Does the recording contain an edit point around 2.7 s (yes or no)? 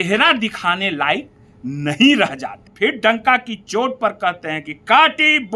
yes